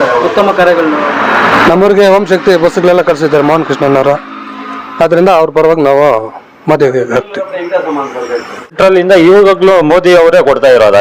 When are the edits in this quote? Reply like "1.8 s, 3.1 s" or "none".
1.0 s, 8.7 s

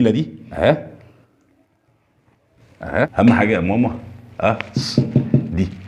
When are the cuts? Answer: 3.1 s

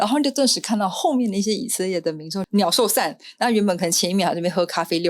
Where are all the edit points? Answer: 2.4 s

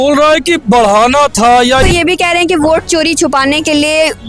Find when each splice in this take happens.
1.8 s

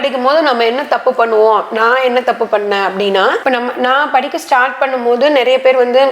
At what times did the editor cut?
3.4 s

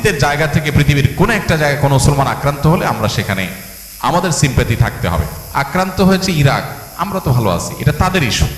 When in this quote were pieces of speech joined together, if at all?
5.4 s

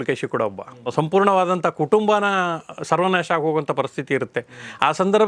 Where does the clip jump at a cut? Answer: 0.9 s

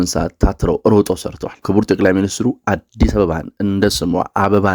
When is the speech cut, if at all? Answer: 1.6 s

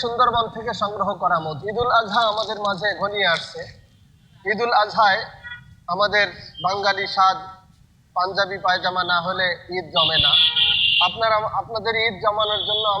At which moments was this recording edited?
1.6 s

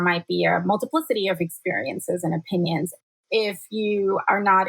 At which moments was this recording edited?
2.9 s

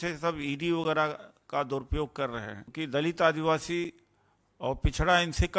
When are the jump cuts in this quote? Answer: 2.6 s

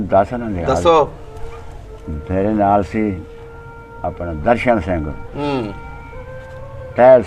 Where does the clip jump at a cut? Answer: none

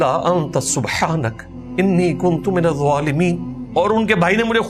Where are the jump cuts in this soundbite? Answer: 3.5 s

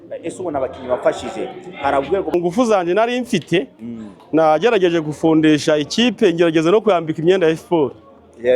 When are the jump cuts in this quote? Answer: 2.3 s

